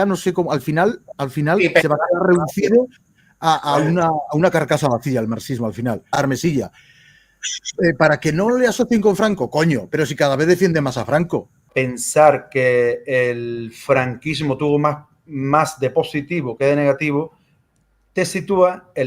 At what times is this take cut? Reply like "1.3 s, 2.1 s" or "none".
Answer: 6.1 s, 11.7 s